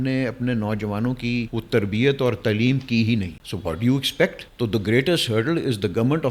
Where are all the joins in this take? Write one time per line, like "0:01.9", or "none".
0:01.5
0:03.3
0:04.4